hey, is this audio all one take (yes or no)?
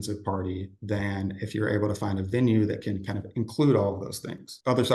yes